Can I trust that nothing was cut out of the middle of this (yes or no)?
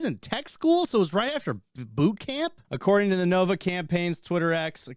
no